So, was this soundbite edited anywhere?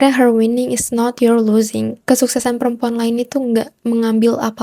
no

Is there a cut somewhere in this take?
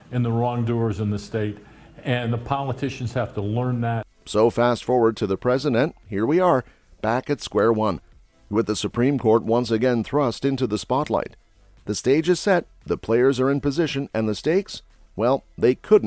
no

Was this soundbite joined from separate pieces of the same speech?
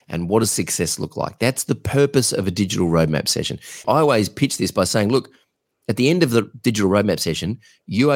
yes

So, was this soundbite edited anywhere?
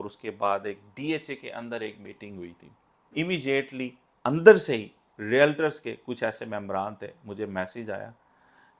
yes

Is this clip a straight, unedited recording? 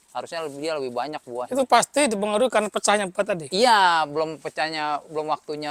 yes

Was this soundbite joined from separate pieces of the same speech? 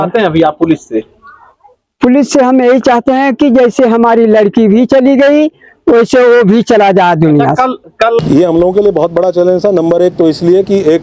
yes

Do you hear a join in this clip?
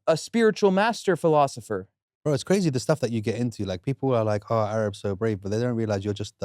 yes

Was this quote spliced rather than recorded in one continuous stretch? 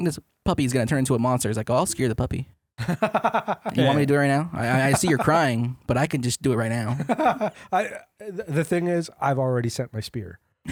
no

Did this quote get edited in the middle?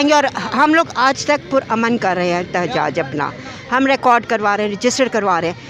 no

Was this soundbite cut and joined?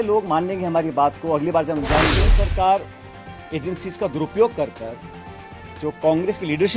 yes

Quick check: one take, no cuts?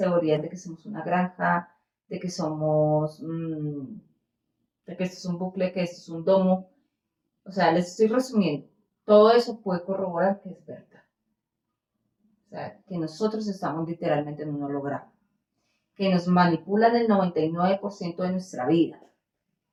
yes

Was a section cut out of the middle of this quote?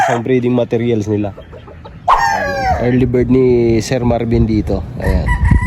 yes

